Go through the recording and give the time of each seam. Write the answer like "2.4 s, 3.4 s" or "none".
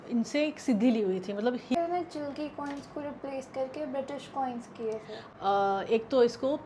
1.7 s, 5.1 s